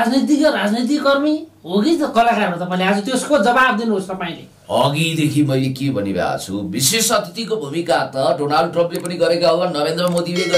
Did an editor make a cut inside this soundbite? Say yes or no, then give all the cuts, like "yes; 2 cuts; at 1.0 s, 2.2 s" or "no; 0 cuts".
no; 0 cuts